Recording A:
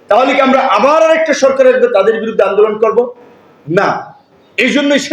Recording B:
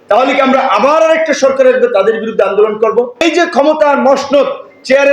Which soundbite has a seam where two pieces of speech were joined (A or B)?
B